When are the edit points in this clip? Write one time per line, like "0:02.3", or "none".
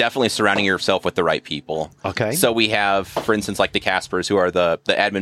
none